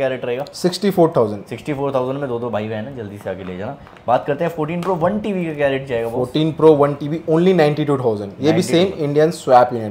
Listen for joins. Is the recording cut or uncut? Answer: uncut